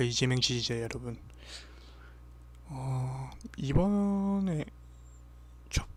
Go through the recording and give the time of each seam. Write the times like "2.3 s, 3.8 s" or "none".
none